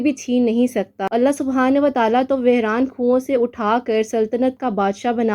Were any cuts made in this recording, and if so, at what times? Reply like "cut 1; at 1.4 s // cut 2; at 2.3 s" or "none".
cut 1; at 1.1 s